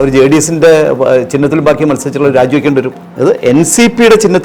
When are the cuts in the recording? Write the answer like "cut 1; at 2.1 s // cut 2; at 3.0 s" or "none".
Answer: cut 1; at 3.0 s